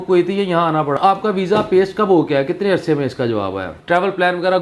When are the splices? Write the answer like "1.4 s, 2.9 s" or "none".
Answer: 1.0 s, 3.8 s